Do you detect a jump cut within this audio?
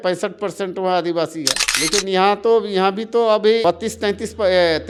no; 0 cuts

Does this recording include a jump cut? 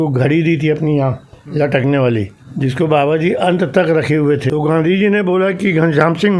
yes; 2 cuts; at 2.4 s, 4.4 s

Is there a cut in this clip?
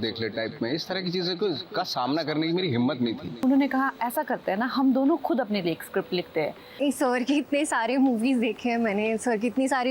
yes; 2 cuts; at 3.4 s, 6.8 s

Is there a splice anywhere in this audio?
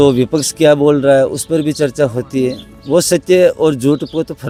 no; 0 cuts

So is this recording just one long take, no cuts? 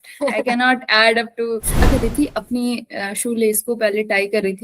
no; 1 cut; at 1.9 s

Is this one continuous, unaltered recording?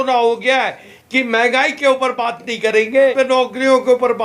no; 2 cuts; at 0.9 s, 3.1 s

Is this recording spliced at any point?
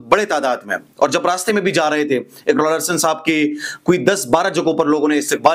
no; 0 cuts

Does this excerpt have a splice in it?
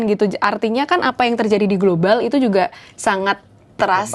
no; 0 cuts

